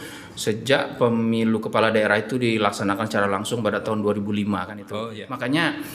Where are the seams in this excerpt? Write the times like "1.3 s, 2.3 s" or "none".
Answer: 4.9 s